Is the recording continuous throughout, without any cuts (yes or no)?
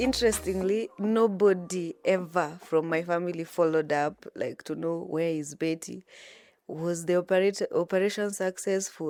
yes